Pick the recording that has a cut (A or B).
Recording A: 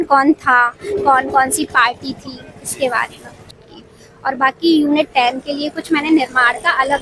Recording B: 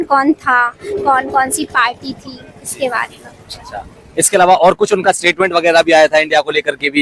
A